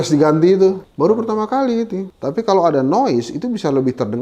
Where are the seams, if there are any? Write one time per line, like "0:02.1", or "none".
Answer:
0:00.9
0:02.1